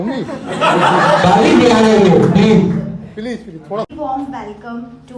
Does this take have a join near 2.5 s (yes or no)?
no